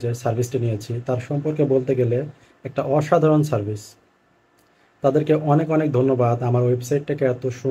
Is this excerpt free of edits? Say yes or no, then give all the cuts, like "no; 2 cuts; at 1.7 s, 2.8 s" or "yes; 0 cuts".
yes; 0 cuts